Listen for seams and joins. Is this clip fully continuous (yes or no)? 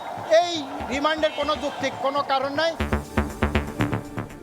no